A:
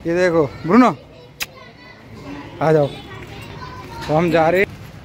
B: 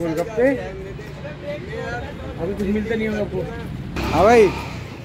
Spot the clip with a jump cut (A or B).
B